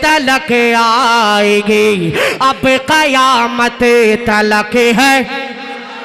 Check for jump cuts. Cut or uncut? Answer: uncut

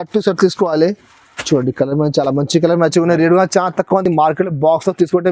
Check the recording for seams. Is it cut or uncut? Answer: uncut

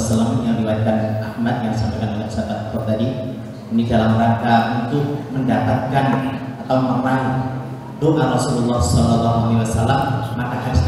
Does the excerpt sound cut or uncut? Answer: uncut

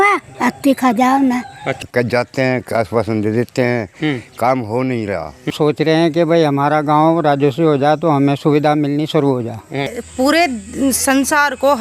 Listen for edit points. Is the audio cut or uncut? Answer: cut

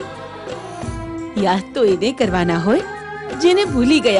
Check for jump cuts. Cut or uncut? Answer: uncut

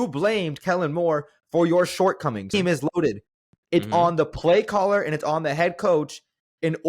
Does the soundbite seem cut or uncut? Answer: cut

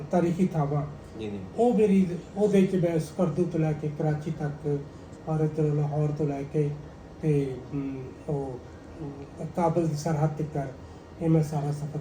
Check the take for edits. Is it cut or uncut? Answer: uncut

